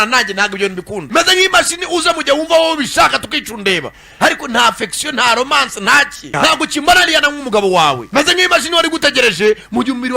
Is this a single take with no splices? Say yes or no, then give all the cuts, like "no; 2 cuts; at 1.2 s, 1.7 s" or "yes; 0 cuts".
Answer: no; 1 cut; at 1.0 s